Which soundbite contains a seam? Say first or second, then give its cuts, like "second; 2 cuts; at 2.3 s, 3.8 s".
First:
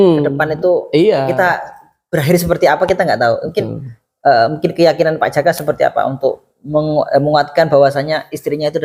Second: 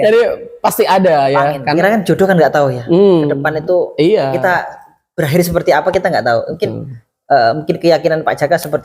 second; 1 cut; at 1.8 s